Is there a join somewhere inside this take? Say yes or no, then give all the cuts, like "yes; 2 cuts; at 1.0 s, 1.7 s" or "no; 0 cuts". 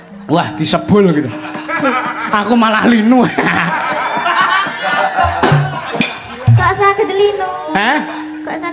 no; 0 cuts